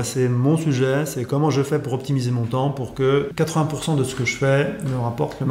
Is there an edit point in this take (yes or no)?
yes